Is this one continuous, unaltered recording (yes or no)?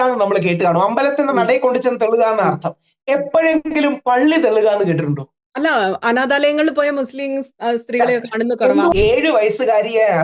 no